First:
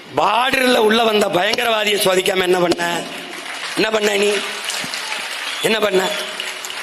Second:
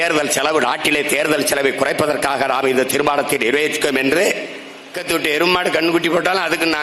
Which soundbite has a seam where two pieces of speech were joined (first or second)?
second